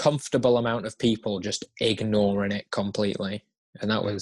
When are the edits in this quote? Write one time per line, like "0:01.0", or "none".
none